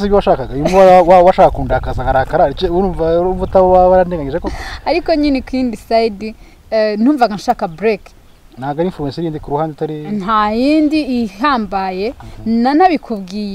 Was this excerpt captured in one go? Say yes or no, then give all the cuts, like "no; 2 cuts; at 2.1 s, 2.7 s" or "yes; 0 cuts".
yes; 0 cuts